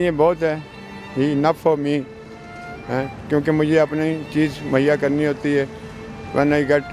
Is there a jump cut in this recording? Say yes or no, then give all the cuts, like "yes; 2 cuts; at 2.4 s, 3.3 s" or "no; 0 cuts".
no; 0 cuts